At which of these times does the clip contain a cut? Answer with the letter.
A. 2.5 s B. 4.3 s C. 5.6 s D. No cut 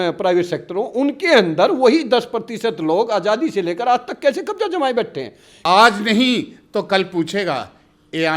C